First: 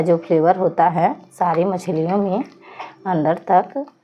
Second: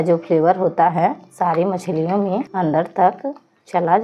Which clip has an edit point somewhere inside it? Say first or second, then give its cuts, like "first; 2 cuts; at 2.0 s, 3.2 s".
second; 1 cut; at 2.5 s